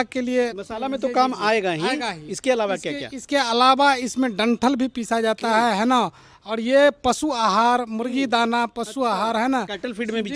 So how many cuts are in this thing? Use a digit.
0